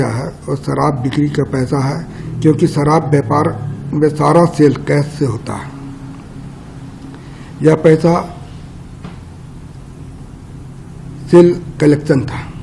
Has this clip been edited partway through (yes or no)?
no